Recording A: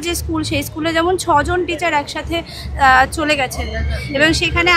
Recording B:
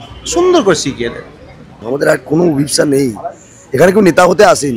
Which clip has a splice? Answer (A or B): B